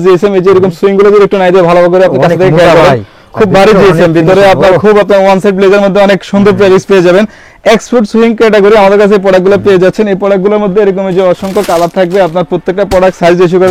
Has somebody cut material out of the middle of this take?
no; 0 cuts

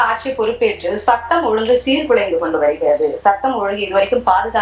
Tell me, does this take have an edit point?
no; 0 cuts

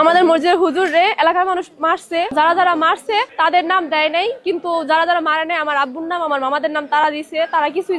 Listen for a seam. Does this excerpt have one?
yes; 2 cuts; at 2.3 s, 3.3 s

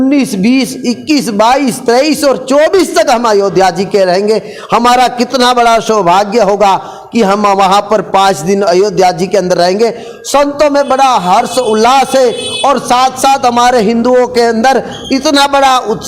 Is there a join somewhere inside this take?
no; 0 cuts

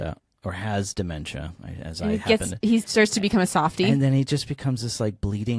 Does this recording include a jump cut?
no; 0 cuts

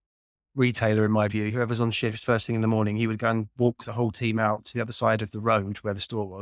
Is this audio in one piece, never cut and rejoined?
no; 1 cut; at 1.5 s

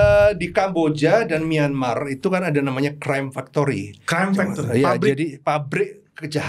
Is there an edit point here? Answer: no; 0 cuts

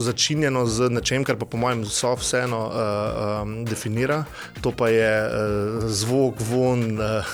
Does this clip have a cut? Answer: no; 0 cuts

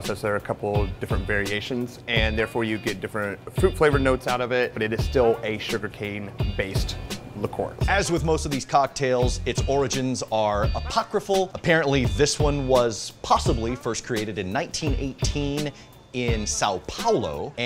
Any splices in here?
no; 0 cuts

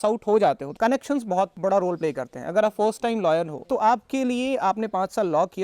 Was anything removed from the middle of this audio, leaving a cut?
yes; 2 cuts; at 1.5 s, 3.6 s

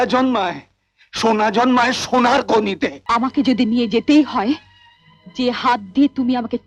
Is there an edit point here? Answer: yes; 1 cut; at 3.0 s

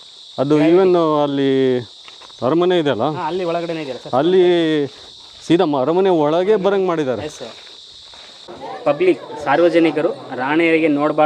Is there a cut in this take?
yes; 1 cut; at 8.6 s

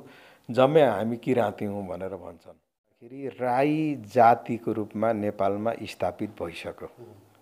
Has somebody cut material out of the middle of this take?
yes; 1 cut; at 3.2 s

